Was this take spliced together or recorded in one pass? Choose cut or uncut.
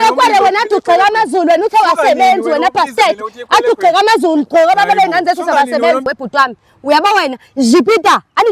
cut